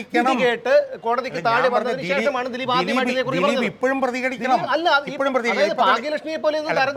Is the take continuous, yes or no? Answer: yes